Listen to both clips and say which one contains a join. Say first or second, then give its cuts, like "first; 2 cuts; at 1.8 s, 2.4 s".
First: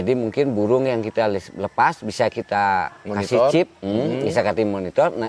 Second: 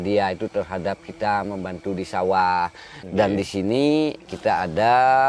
second; 1 cut; at 3.0 s